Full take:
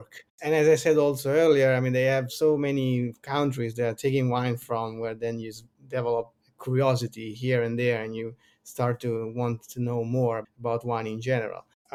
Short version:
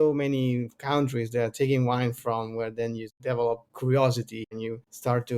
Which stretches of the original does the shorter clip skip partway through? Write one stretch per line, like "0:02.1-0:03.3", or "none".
0:05.9-0:06.3
0:07.3-0:08.2